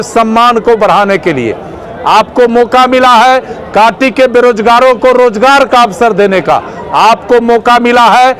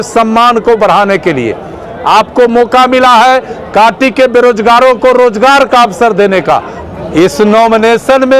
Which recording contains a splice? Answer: second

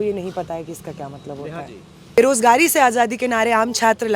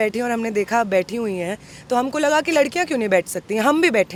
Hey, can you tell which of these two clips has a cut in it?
first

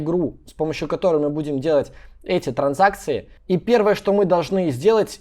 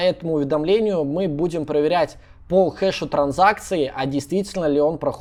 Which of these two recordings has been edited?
first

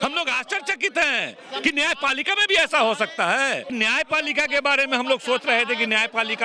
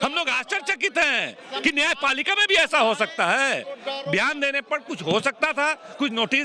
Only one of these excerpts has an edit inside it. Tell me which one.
first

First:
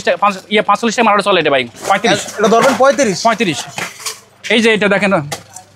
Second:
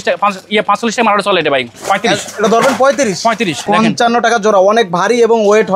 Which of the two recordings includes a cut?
second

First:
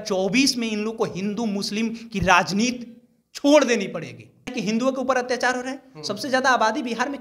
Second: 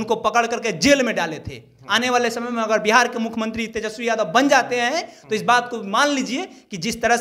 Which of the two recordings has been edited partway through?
first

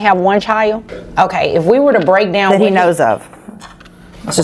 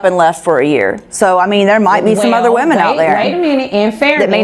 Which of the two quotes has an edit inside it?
first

